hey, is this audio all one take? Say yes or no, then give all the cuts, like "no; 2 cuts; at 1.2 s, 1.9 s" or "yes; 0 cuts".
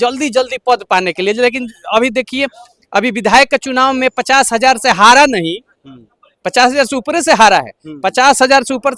yes; 0 cuts